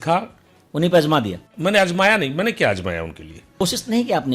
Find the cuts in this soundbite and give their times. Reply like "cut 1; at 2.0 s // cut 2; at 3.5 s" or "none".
cut 1; at 1.4 s // cut 2; at 3.6 s

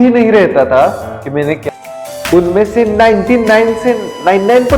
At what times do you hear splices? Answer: cut 1; at 1.6 s

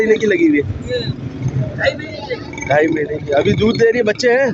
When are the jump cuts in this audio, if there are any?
none

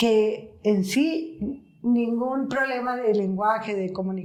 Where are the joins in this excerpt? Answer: none

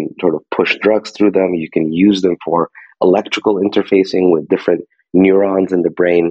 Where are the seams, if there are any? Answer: none

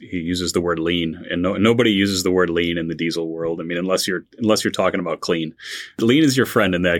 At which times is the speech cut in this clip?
cut 1; at 6.0 s

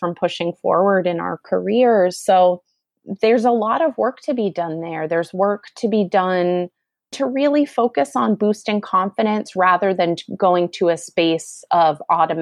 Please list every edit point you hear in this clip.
cut 1; at 7.2 s

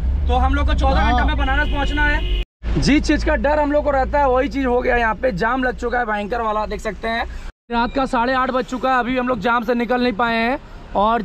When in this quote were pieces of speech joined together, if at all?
cut 1; at 2.5 s // cut 2; at 7.4 s

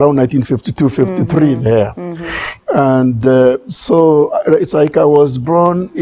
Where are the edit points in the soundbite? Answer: none

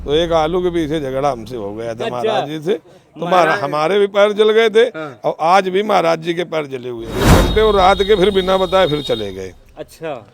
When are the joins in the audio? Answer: cut 1; at 7.2 s

